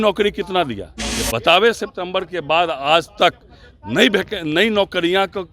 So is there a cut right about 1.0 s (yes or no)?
yes